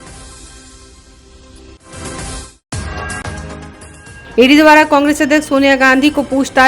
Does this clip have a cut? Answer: no; 0 cuts

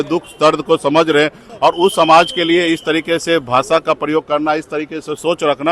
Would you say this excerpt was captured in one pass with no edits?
no; 1 cut; at 1.5 s

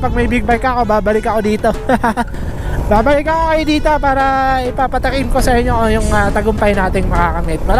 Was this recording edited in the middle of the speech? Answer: no; 0 cuts

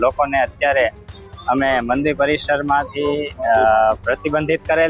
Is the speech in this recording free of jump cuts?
yes; 0 cuts

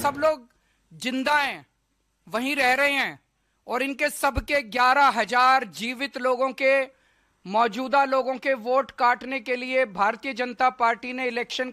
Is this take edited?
no; 0 cuts

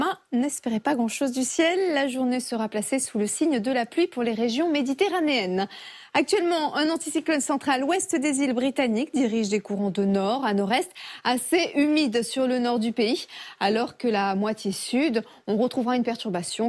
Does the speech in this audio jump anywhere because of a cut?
yes; 1 cut; at 9.1 s

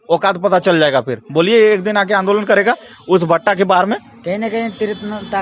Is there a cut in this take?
no; 0 cuts

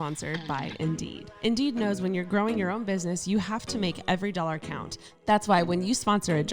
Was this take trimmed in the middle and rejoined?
yes; 1 cut; at 1.2 s

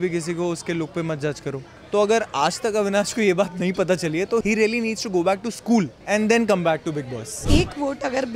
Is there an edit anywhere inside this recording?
yes; 4 cuts; at 1.7 s, 4.4 s, 6.0 s, 7.4 s

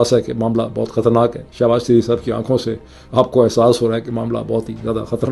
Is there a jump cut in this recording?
no; 0 cuts

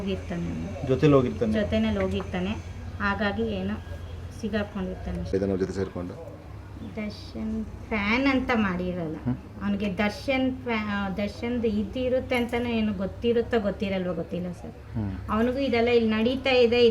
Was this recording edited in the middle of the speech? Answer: no; 0 cuts

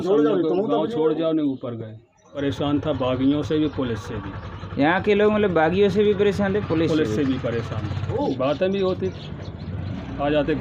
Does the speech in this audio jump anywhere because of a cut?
yes; 2 cuts; at 2.4 s, 8.1 s

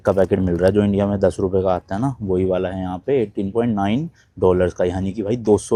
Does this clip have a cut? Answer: no; 0 cuts

